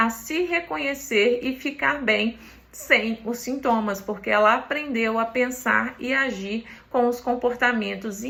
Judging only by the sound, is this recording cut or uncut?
uncut